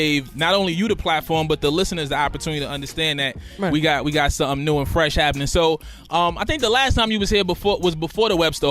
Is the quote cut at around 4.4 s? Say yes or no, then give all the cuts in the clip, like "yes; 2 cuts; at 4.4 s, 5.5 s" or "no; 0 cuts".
no; 1 cut; at 7.1 s